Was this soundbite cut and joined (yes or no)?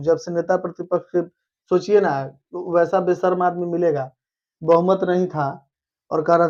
no